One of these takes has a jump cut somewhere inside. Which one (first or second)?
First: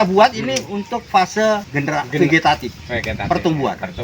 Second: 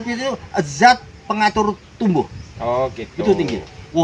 first